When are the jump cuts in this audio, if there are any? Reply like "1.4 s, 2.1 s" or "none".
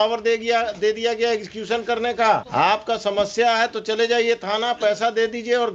none

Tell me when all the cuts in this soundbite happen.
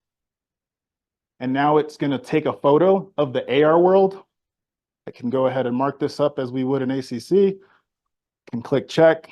none

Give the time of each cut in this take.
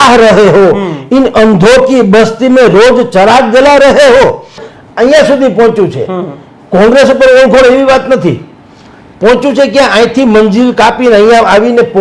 4.6 s

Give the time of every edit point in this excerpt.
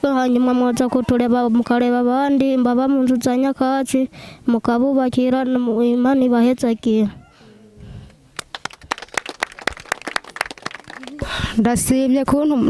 11.2 s

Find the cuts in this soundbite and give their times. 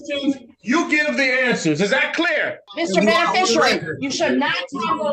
2.6 s

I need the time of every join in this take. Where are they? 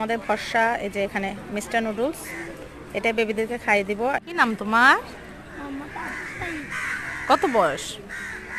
4.3 s

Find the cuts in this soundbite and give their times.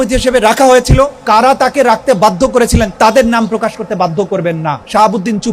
1.2 s, 2.9 s, 4.3 s

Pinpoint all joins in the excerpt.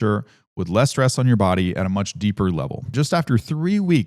2.9 s

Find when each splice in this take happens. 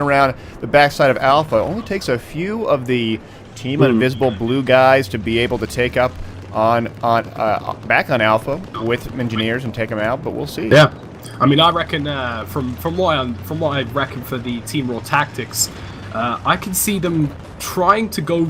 17.6 s

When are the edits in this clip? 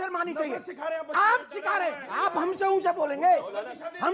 2.0 s

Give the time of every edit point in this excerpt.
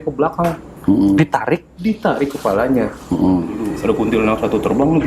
3.7 s

